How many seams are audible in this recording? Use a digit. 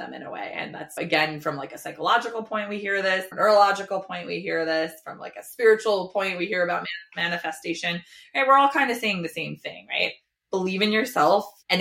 1